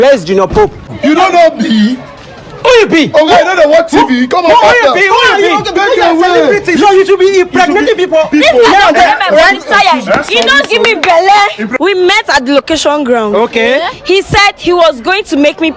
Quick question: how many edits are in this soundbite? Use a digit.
2